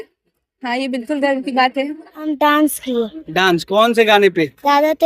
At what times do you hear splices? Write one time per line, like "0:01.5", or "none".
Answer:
0:02.1